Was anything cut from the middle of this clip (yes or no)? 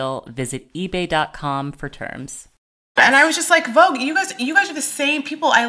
yes